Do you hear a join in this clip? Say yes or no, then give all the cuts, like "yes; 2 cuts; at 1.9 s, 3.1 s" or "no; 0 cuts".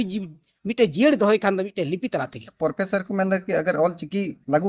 yes; 1 cut; at 2.4 s